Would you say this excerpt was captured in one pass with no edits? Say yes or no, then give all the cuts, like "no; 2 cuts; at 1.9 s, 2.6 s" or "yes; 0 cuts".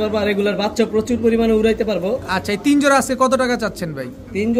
yes; 0 cuts